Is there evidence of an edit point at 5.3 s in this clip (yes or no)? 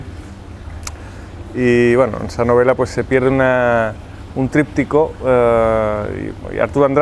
yes